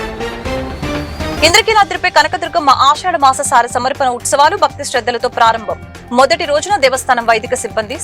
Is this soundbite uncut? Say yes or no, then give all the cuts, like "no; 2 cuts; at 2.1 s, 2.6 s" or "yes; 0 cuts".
yes; 0 cuts